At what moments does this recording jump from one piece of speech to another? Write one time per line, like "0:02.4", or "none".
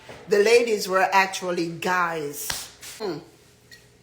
0:03.0